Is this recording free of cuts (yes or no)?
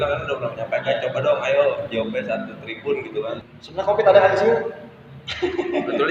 no